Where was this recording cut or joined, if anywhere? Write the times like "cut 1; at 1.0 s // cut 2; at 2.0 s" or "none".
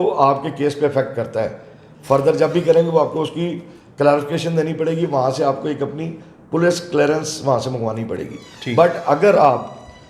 none